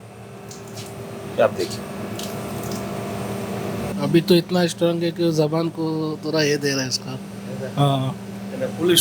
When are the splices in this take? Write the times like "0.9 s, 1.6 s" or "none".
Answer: 3.9 s